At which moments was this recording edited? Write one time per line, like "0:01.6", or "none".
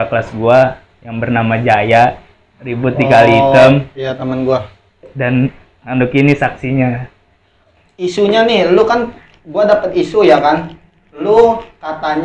0:07.7